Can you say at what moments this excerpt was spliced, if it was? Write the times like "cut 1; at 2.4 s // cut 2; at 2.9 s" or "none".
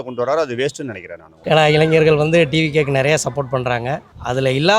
cut 1; at 1.3 s